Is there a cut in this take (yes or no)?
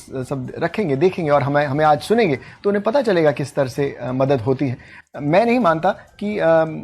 yes